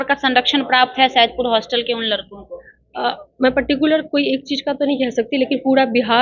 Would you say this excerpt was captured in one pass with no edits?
yes; 0 cuts

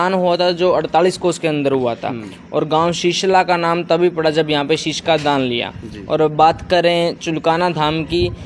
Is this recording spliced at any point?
no; 0 cuts

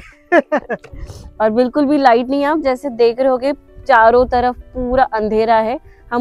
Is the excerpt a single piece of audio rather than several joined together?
no; 1 cut; at 1.2 s

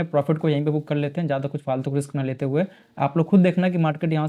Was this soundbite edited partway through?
no; 0 cuts

